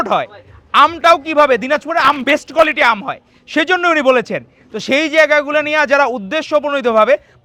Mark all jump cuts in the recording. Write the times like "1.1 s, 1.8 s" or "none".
none